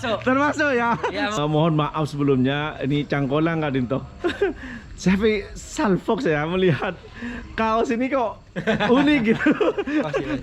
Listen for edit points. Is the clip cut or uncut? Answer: cut